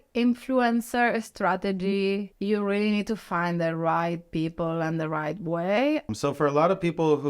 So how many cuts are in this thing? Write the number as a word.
two